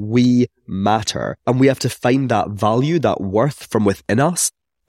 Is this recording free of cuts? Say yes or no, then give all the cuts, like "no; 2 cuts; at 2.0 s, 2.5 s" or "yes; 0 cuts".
no; 1 cut; at 1.3 s